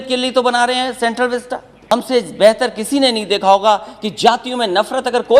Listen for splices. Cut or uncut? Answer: cut